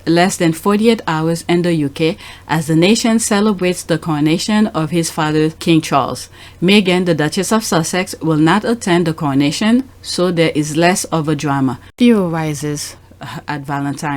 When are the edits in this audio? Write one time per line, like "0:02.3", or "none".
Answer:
0:05.6
0:11.8